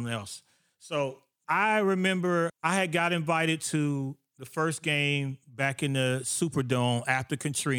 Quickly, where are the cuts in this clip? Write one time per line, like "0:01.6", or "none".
0:02.6